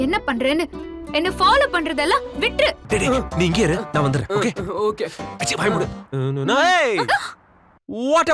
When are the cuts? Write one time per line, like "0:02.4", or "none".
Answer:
0:02.8
0:06.1